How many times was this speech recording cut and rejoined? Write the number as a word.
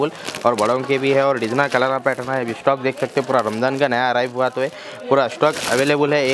zero